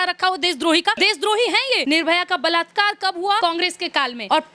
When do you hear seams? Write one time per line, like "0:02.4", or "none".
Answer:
0:01.0
0:01.8
0:03.8